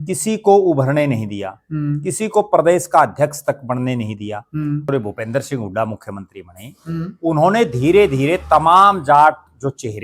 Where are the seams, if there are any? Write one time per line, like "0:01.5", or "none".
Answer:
0:04.9